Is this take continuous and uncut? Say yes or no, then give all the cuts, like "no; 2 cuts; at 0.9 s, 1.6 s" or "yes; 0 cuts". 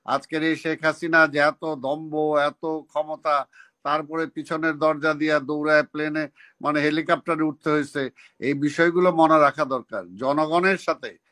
yes; 0 cuts